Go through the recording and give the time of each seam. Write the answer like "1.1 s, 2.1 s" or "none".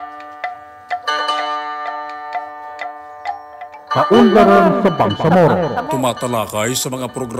4.0 s